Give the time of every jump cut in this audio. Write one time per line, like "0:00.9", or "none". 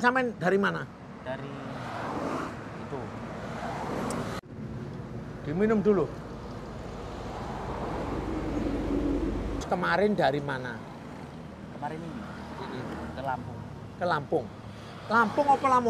0:04.4
0:09.6